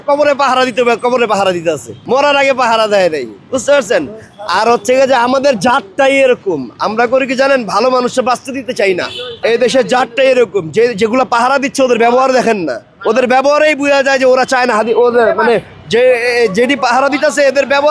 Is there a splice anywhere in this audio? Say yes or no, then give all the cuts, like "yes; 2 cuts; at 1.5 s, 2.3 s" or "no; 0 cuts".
no; 0 cuts